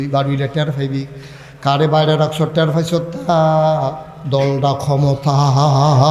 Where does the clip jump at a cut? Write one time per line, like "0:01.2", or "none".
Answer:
none